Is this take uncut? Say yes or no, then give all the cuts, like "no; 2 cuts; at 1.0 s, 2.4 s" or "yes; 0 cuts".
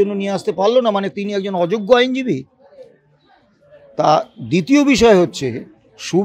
yes; 0 cuts